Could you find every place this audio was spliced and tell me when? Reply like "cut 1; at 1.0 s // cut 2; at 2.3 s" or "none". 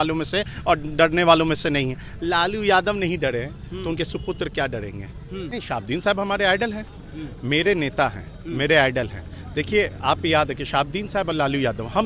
cut 1; at 5.5 s